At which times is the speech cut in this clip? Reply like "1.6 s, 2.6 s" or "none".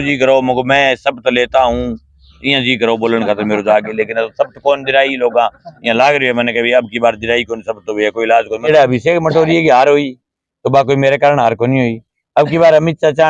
8.6 s